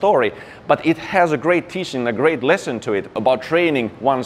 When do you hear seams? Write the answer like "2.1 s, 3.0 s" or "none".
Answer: 3.2 s

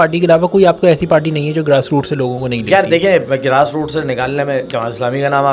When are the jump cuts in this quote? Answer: none

